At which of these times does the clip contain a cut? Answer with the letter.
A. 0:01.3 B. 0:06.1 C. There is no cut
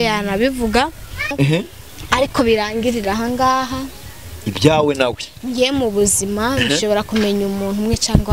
A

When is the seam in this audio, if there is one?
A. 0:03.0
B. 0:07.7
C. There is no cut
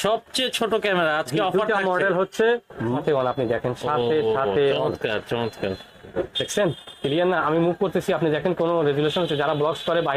A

